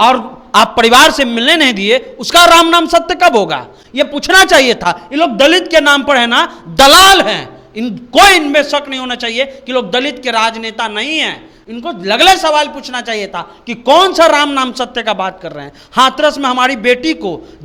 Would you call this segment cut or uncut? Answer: uncut